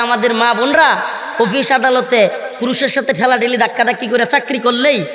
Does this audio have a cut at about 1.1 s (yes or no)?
no